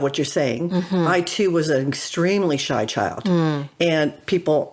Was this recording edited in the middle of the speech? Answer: no; 0 cuts

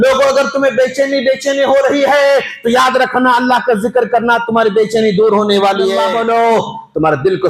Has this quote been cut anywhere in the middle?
yes; 1 cut; at 6.1 s

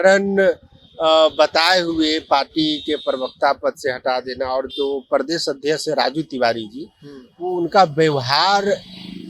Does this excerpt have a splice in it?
no; 0 cuts

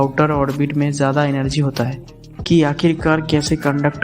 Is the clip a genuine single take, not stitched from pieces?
no; 1 cut; at 2.3 s

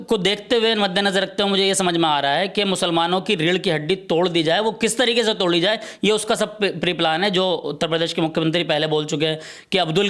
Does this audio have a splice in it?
no; 0 cuts

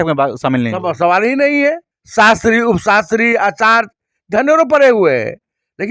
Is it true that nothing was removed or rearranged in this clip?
no; 1 cut; at 1.9 s

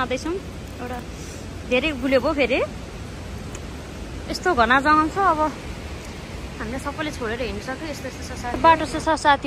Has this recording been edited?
yes; 1 cut; at 8.5 s

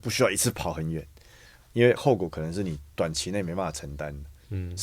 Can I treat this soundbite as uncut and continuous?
yes; 0 cuts

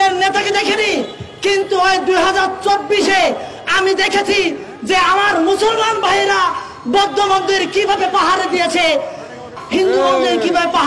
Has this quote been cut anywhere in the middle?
yes; 1 cut; at 9.6 s

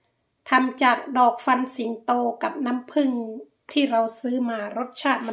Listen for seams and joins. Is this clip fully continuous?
yes; 0 cuts

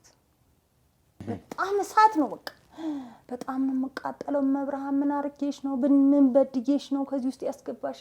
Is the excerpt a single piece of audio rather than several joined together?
no; 1 cut; at 1.2 s

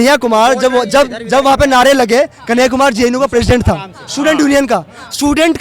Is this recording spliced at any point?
no; 0 cuts

